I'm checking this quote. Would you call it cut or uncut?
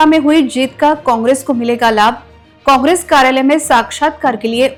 uncut